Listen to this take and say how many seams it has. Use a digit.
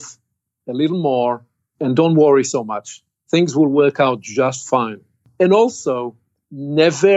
2